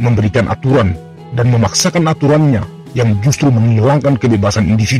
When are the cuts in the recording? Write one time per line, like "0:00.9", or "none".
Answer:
none